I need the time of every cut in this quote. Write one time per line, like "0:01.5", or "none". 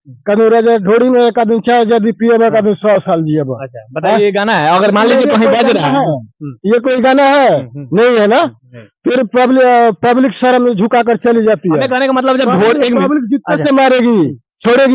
none

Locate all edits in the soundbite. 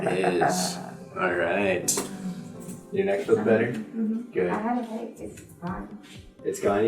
0:02.8

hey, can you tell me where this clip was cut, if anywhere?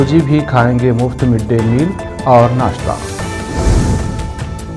none

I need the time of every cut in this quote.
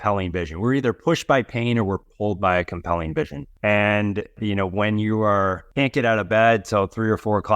0:03.4
0:04.4
0:05.6

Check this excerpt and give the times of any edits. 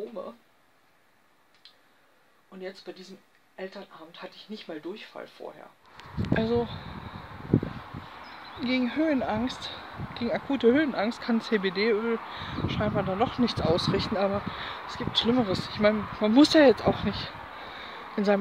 0:05.9

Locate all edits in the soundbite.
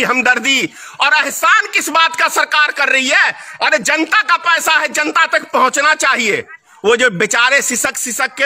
0:06.6

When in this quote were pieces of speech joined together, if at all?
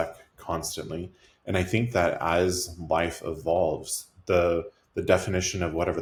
none

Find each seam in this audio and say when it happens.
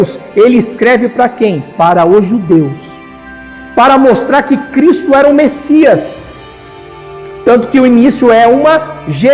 none

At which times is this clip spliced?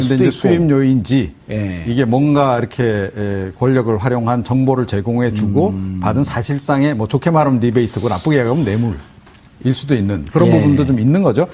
0:10.2

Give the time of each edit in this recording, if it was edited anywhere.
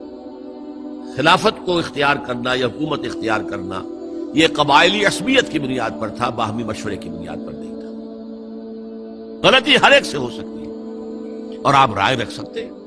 0:07.1
0:09.2

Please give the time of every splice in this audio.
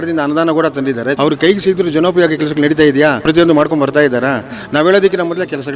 0:01.2
0:03.2

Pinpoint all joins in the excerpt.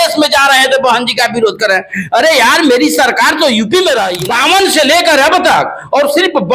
0:04.2

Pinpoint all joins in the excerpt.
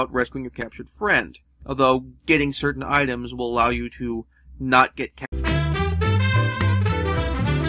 none

